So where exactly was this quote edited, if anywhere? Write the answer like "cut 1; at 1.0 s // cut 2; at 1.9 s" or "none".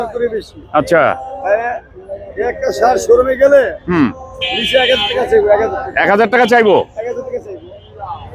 none